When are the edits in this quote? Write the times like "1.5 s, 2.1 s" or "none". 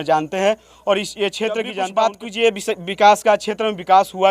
1.7 s